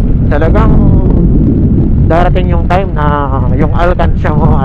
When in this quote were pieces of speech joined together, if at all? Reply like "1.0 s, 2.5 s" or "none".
none

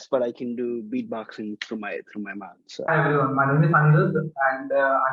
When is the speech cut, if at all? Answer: 2.9 s

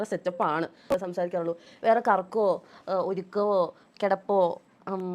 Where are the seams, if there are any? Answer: 0.9 s

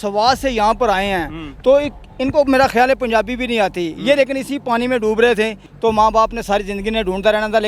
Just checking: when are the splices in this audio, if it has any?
5.6 s

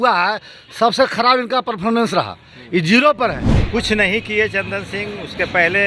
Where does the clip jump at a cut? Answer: 3.5 s

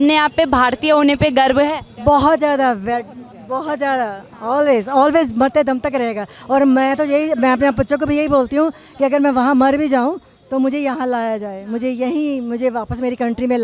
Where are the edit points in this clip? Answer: none

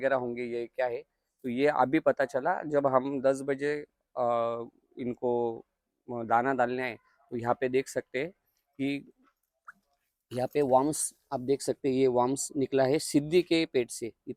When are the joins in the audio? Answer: none

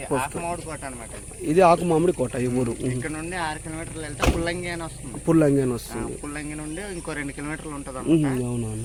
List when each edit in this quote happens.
none

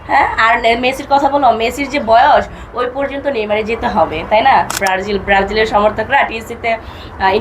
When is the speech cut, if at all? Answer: 4.7 s

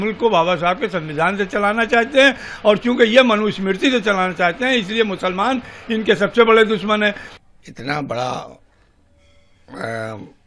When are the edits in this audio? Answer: 7.3 s

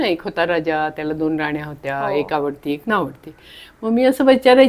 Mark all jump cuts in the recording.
none

